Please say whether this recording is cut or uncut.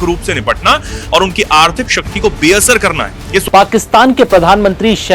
cut